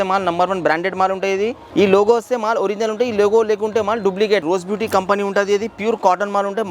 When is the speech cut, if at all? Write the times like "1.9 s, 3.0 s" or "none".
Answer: 1.6 s, 4.4 s